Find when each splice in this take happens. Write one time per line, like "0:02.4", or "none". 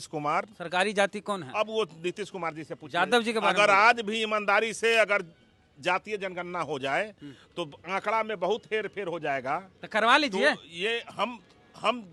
none